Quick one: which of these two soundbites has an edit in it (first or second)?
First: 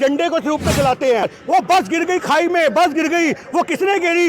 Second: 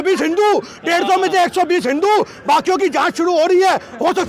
first